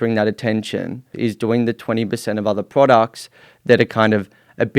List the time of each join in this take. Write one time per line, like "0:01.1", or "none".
0:01.1